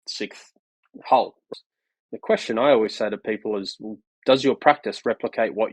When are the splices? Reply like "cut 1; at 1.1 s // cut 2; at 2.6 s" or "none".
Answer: cut 1; at 1.5 s